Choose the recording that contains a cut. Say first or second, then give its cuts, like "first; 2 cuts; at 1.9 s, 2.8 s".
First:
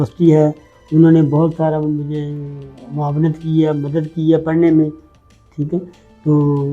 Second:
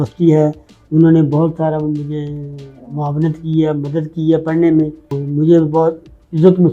second; 1 cut; at 5.2 s